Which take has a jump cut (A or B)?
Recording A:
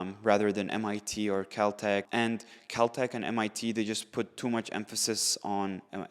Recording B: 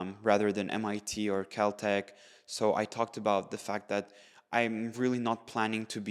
A